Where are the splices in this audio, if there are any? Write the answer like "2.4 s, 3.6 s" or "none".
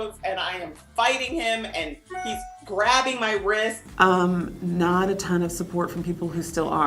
3.8 s